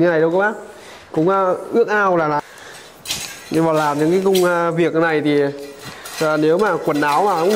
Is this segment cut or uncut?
cut